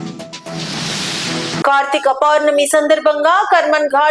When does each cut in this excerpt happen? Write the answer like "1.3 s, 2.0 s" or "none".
1.5 s